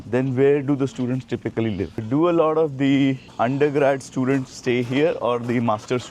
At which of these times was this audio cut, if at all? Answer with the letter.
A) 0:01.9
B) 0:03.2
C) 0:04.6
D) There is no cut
A